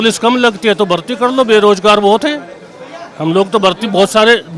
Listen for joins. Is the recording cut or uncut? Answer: uncut